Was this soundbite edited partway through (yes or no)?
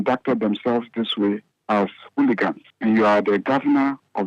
yes